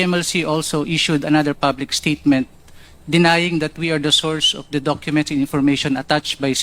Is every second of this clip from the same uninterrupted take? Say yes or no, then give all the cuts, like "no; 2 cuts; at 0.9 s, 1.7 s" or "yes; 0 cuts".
yes; 0 cuts